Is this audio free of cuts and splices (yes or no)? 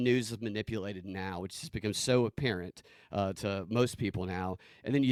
yes